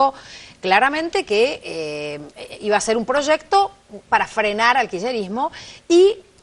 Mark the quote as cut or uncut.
uncut